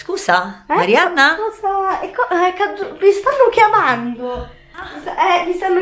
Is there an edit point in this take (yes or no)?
yes